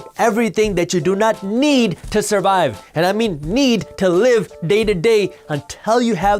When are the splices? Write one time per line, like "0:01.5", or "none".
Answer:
none